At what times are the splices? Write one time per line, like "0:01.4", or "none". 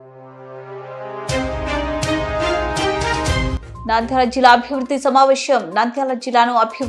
0:03.6